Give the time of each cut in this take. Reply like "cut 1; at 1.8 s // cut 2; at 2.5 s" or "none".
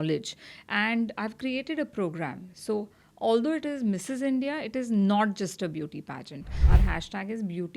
cut 1; at 6.5 s

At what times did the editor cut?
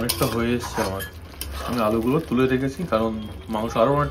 none

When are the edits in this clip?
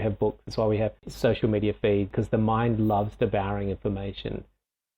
cut 1; at 2.1 s

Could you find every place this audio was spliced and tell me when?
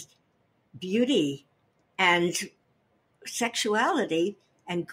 none

